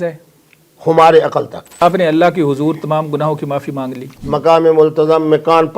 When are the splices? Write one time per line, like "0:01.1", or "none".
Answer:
0:01.8
0:04.1